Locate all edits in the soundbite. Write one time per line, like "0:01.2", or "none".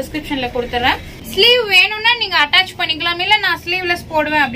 0:01.1

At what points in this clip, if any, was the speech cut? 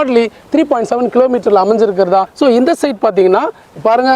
0:02.3

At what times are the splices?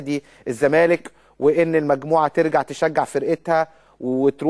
none

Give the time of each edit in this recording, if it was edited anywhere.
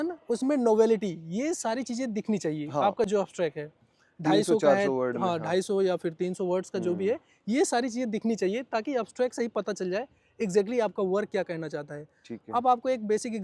none

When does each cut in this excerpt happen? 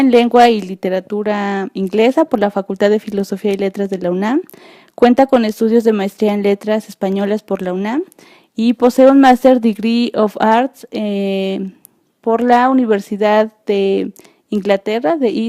0:06.2

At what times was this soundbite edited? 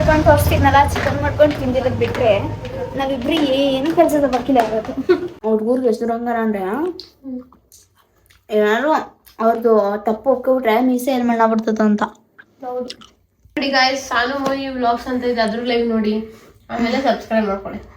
0:05.3
0:13.6

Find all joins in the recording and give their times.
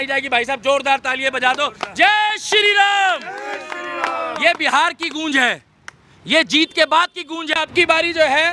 0:07.6

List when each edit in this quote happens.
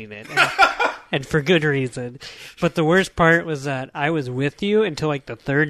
none

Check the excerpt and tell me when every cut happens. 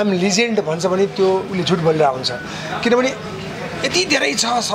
none

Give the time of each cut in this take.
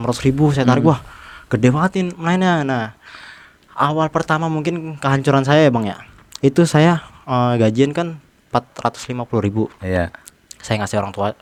none

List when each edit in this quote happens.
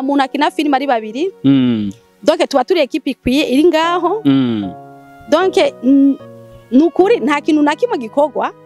none

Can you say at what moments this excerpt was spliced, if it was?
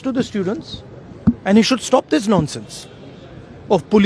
none

